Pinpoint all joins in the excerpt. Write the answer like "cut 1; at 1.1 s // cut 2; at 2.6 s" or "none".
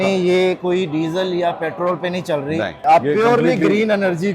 cut 1; at 2.8 s